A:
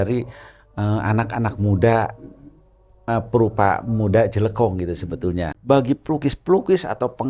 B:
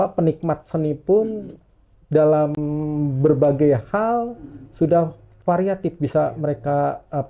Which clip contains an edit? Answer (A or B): A